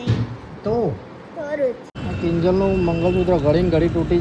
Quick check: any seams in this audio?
yes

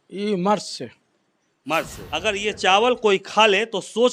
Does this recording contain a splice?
yes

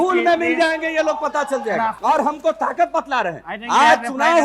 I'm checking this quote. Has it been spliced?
yes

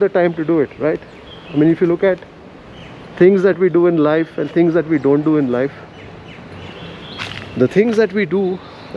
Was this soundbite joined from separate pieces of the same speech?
no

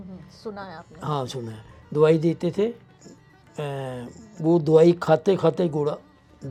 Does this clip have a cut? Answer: no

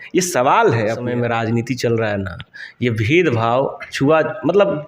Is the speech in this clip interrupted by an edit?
yes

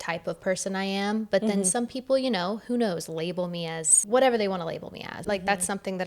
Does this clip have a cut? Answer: yes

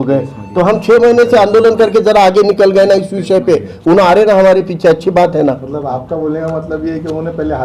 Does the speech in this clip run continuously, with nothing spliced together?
yes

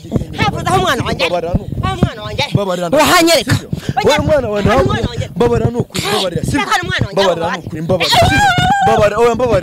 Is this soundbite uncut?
yes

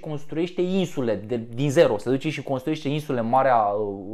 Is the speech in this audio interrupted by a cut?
no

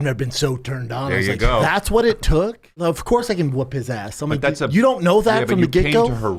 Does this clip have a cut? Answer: yes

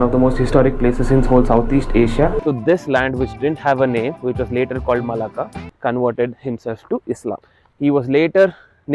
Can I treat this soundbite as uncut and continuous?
no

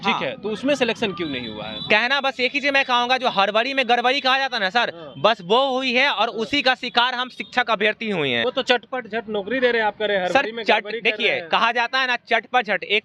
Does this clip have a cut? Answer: yes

